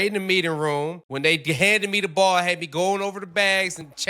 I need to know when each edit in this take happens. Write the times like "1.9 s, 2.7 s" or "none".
1.2 s

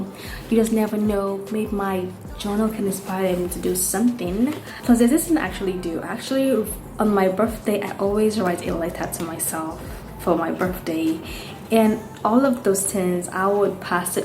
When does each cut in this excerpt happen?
4.7 s

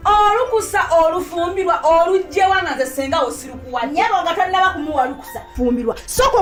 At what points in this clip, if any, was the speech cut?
none

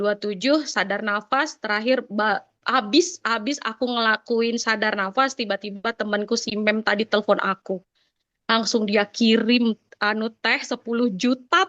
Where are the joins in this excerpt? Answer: none

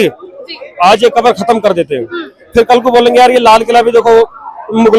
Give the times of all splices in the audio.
none

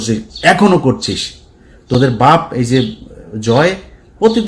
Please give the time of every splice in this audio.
none

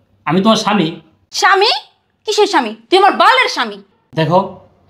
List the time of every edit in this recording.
3.9 s

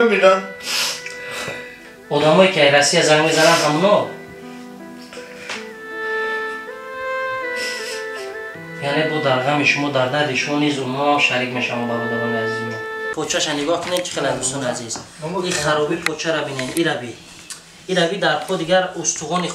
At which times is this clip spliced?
13.0 s

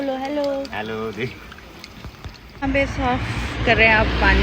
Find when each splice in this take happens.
2.6 s

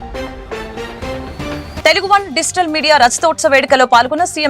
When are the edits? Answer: 1.8 s

